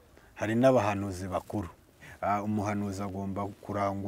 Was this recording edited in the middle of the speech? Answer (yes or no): yes